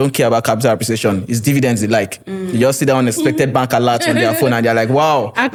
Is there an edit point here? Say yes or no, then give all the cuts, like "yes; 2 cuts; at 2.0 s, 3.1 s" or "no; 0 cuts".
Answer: no; 0 cuts